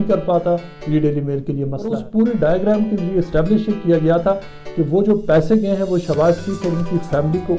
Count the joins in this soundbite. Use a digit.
1